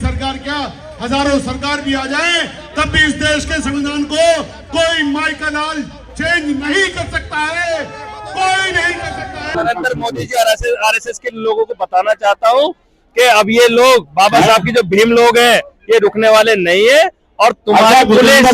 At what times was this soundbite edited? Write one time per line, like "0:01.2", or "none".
0:09.5